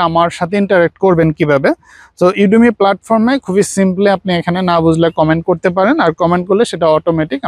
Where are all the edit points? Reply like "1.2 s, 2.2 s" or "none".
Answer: none